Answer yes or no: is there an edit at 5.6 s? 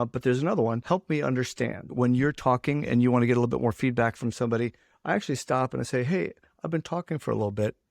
no